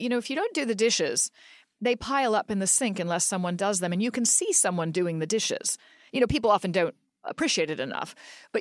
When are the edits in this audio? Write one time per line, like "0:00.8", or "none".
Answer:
0:07.3

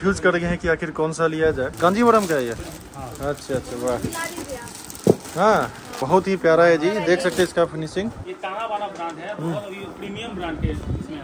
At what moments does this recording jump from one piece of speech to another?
0:01.7
0:06.0
0:08.2

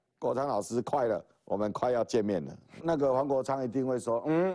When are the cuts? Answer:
0:02.8

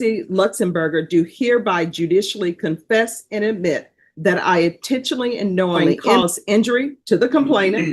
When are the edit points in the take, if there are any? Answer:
0:06.0

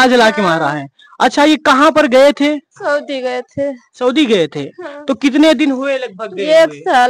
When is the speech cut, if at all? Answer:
none

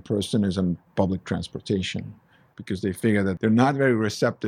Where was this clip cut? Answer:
0:03.4

